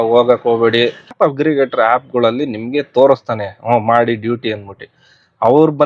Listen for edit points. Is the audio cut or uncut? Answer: cut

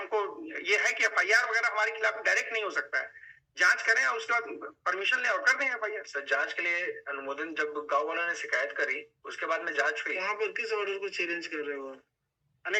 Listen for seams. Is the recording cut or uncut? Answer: uncut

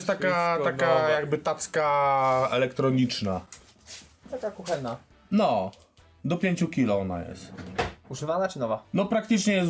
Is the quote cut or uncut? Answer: uncut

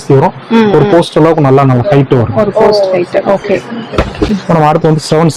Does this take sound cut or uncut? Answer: uncut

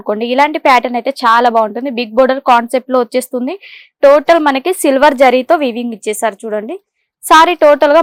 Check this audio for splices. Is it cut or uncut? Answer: uncut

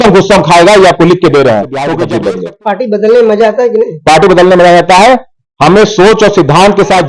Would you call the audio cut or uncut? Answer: cut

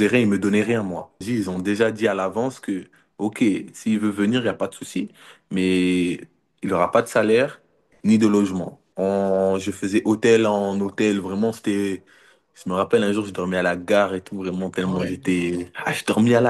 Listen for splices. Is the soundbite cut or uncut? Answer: cut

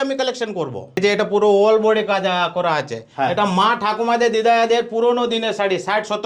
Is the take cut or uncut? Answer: cut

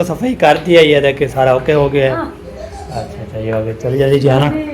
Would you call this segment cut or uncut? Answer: cut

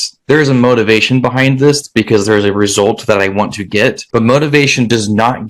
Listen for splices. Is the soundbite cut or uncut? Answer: cut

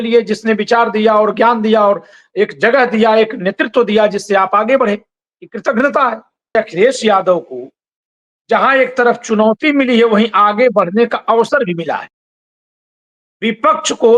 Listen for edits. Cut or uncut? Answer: cut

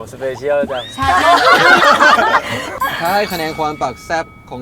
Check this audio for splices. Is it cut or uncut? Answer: cut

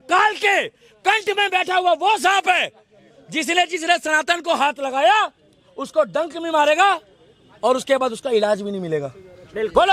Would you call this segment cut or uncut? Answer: uncut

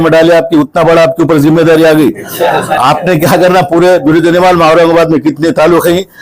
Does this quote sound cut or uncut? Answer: uncut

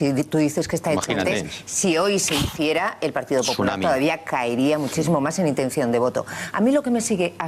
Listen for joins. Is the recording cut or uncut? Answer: cut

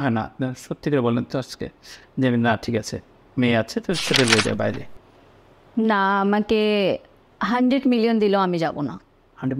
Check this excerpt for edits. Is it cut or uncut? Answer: uncut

